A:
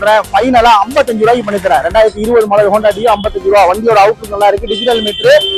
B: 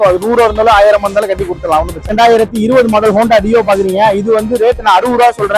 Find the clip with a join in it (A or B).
B